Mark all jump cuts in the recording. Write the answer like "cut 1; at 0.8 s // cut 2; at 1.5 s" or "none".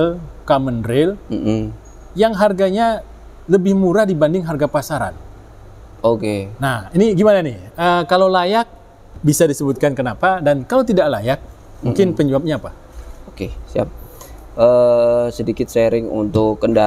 none

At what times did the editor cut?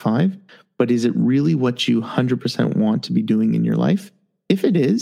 none

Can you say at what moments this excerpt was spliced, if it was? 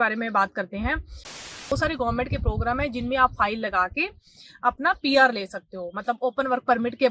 cut 1; at 1.5 s

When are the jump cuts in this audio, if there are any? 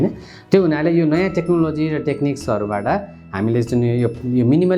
none

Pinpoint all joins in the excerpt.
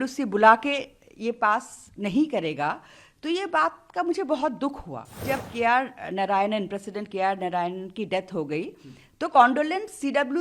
cut 1; at 5.2 s

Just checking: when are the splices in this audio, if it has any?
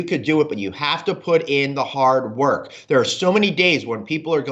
none

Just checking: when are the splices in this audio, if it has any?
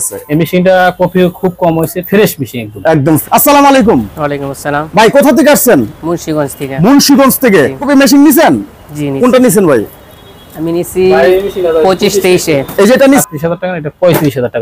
cut 1; at 3.2 s // cut 2; at 7.8 s // cut 3; at 13.2 s

